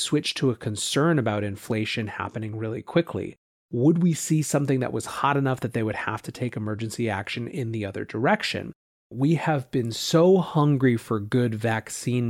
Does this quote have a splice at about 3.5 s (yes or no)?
yes